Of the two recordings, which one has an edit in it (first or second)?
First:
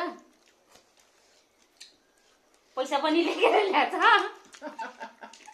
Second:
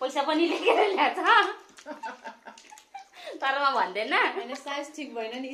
first